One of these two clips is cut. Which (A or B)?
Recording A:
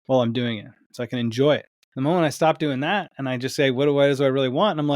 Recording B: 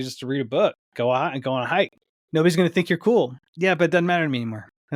A